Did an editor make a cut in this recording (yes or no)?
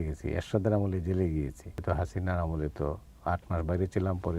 yes